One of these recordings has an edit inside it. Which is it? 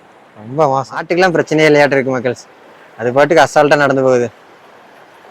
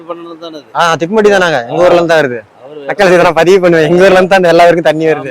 first; 1 cut; at 1.1 s

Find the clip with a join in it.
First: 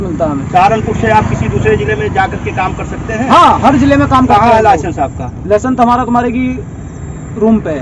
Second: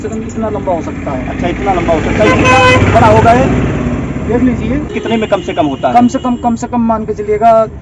second; 1 cut; at 5.0 s

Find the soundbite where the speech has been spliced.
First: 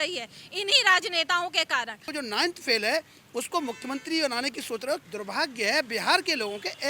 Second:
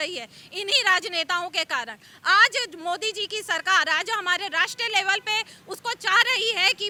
first; 2 cuts; at 2.1 s, 5.0 s

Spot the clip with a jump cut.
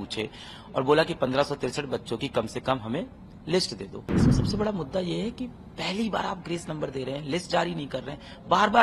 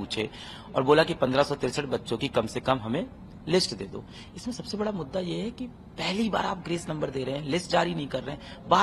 first; 1 cut; at 4.0 s

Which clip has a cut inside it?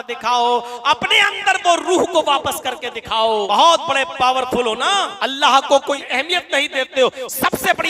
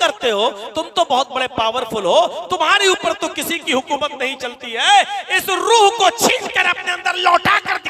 first; 3 cuts; at 3.5 s, 5.1 s, 6.0 s

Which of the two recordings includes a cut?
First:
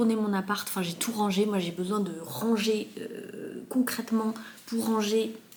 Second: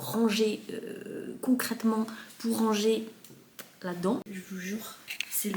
second; 1 cut; at 4.2 s

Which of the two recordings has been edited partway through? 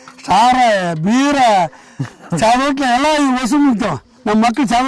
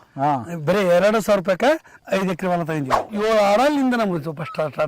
second; 2 cuts; at 2.0 s, 3.1 s

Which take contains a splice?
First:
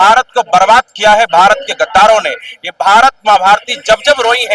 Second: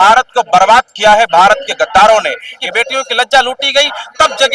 second; 1 cut; at 2.6 s

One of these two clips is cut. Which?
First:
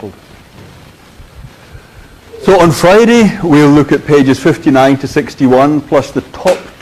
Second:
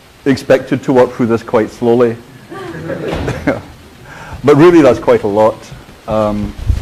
first; 1 cut; at 4.0 s

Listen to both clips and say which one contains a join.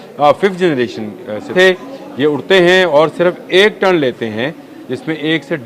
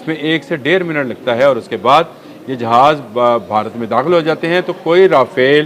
first; 1 cut; at 1.5 s

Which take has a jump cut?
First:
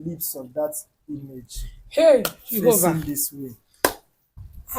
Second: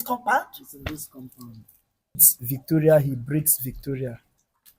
second; 1 cut; at 2.4 s

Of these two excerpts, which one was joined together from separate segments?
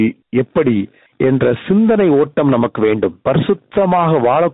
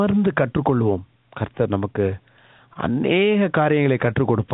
first; 1 cut; at 3.2 s

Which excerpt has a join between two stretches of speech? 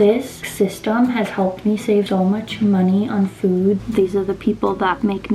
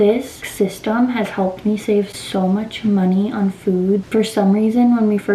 first; 2 cuts; at 2.1 s, 3.8 s

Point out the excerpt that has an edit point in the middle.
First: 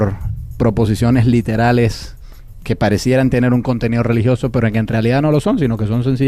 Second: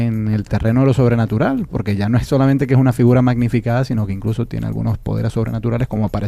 second; 1 cut; at 3.8 s

